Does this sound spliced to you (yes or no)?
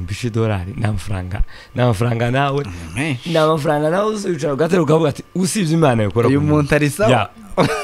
no